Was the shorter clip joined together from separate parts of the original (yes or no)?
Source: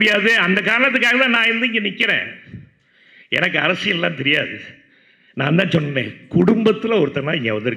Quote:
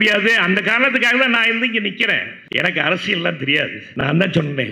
yes